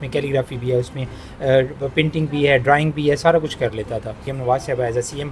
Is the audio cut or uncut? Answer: cut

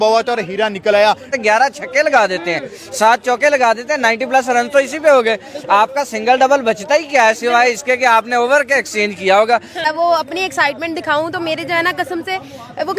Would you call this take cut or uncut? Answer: cut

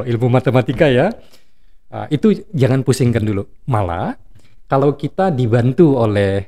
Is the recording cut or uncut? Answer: uncut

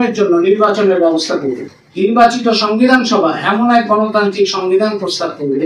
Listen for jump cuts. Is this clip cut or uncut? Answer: cut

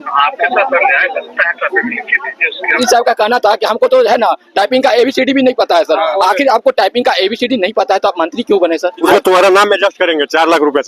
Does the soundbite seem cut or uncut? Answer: cut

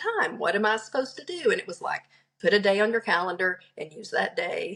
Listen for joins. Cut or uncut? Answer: uncut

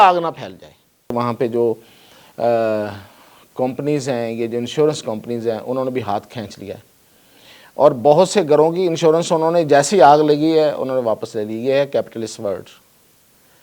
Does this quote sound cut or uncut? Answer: cut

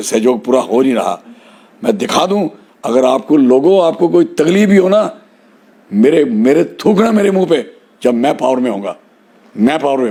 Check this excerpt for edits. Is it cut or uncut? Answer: uncut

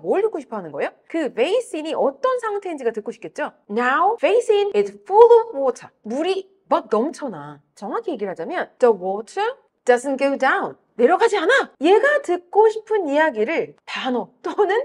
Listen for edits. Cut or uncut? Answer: cut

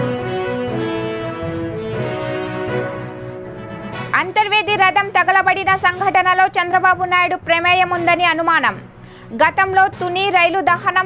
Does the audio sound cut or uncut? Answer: cut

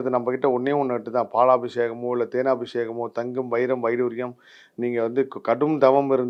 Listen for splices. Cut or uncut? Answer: uncut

